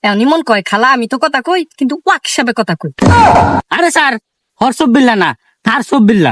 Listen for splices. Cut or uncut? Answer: cut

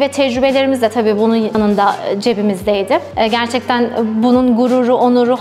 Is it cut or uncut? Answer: cut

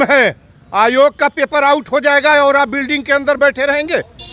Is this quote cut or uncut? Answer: uncut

